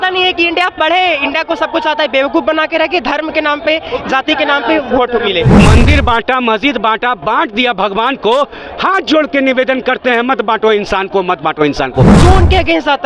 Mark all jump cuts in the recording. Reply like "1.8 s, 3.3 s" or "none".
5.6 s, 12.1 s